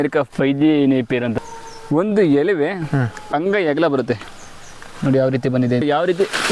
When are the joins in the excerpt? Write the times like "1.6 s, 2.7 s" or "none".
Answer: 1.3 s, 4.3 s, 5.8 s